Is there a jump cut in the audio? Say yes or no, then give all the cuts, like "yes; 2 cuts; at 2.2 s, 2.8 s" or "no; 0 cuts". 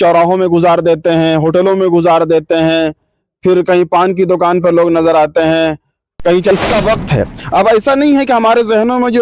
yes; 1 cut; at 6.5 s